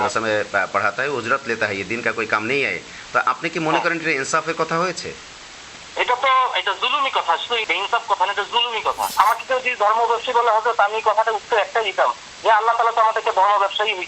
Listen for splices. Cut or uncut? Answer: cut